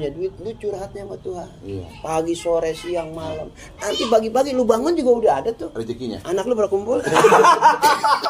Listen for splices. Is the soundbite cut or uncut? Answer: uncut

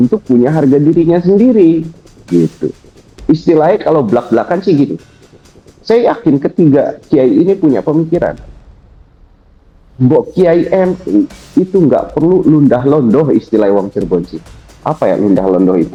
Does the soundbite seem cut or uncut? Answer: uncut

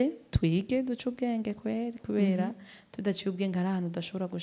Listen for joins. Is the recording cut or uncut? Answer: uncut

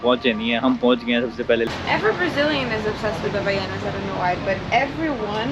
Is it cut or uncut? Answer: cut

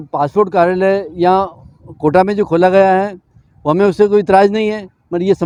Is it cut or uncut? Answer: uncut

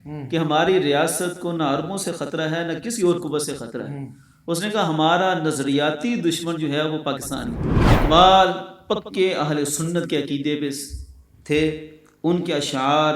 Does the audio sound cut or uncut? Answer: cut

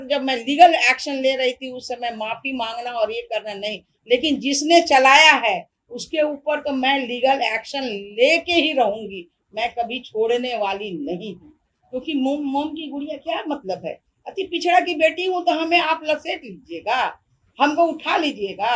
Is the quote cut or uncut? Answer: uncut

